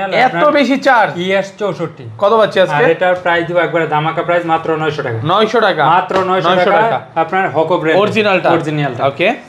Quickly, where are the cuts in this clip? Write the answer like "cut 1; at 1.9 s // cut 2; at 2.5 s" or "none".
none